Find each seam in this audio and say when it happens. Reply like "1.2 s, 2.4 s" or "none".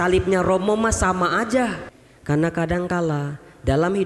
1.9 s